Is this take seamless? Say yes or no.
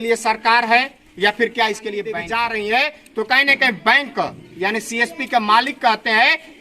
no